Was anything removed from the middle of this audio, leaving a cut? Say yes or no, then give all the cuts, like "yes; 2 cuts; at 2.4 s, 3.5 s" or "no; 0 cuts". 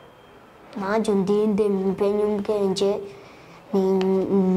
no; 0 cuts